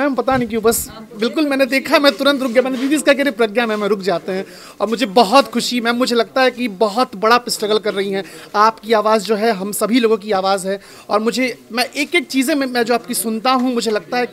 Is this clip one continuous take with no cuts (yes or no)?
yes